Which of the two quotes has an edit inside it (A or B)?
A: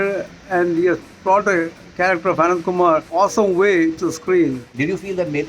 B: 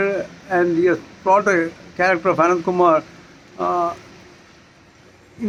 A